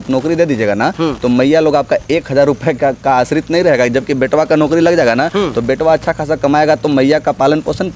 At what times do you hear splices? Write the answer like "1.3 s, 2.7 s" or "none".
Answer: none